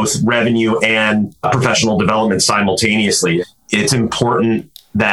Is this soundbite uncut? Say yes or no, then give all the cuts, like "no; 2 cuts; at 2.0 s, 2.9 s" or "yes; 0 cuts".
no; 2 cuts; at 1.4 s, 3.4 s